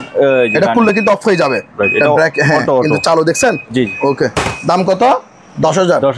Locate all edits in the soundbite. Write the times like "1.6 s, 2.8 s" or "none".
none